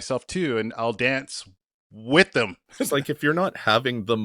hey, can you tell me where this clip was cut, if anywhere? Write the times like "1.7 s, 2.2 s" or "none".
2.9 s